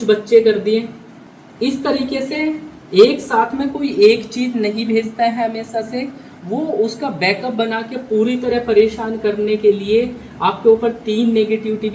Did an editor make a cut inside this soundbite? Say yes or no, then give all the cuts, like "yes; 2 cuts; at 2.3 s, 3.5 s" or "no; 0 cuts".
no; 0 cuts